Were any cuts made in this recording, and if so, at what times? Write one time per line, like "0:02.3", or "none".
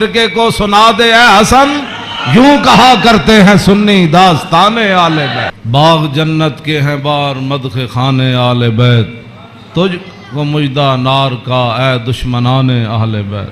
0:05.6